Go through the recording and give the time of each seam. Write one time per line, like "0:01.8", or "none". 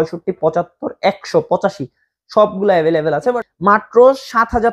0:03.4